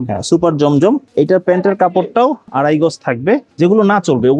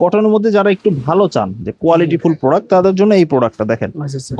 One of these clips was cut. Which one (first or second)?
first